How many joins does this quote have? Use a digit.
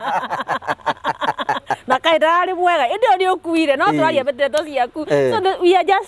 0